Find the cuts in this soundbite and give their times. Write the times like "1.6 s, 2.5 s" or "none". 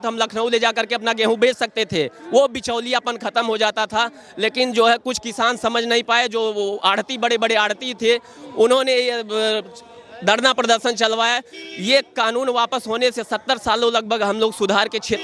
none